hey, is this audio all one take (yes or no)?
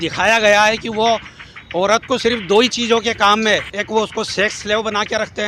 yes